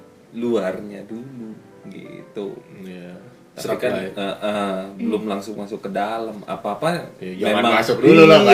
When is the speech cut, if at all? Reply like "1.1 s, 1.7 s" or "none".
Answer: none